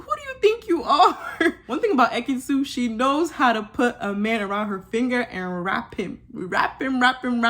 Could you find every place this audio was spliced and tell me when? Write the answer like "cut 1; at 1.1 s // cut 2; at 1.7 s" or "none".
cut 1; at 1.7 s